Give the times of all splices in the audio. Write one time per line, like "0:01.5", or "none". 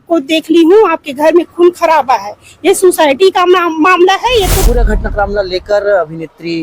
0:04.7